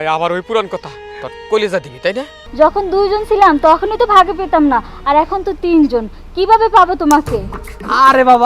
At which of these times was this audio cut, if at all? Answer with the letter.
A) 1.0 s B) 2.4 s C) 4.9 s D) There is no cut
B